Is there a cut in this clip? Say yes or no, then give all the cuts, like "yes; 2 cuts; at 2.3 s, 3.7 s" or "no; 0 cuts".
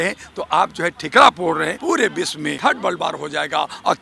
yes; 2 cuts; at 1.8 s, 2.6 s